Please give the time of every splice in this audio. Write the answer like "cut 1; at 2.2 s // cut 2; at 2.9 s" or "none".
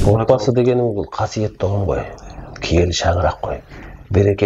none

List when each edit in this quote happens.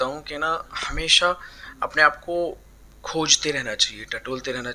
none

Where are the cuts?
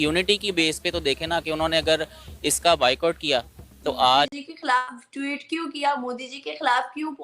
cut 1; at 4.3 s

